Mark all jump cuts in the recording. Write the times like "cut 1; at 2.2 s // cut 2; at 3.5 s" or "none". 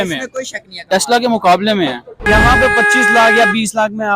cut 1; at 2.1 s